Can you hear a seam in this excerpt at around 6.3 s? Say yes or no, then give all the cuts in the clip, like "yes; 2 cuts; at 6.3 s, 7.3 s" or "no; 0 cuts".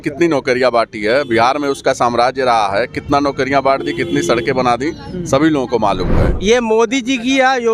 yes; 1 cut; at 6.3 s